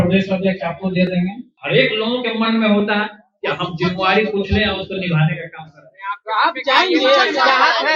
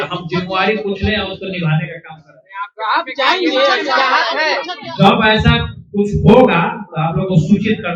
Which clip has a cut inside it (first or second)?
first